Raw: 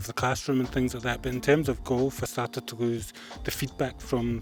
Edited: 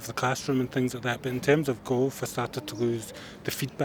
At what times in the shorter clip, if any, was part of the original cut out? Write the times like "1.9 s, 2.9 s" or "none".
none